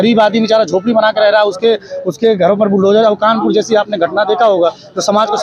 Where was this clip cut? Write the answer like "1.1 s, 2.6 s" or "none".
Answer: none